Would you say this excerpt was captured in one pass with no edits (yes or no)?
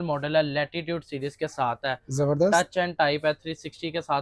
yes